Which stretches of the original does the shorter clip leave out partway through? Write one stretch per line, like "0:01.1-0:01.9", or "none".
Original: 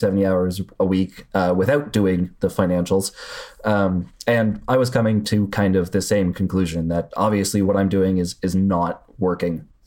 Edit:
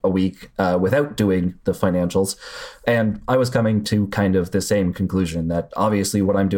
0:03.5-0:04.1